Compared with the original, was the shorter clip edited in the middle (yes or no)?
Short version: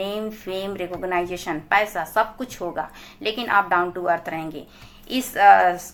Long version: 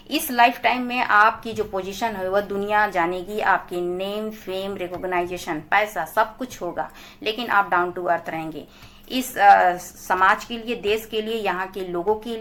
no